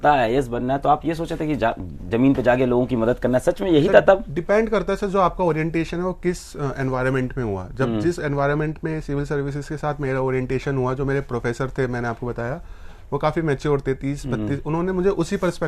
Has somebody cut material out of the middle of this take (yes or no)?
no